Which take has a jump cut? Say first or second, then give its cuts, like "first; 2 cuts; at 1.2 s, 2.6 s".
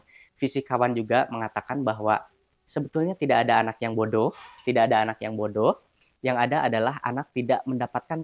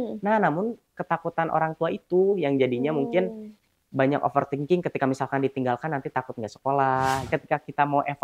second; 1 cut; at 7.3 s